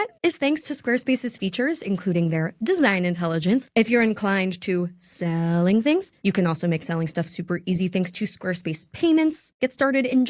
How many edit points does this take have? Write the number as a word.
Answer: three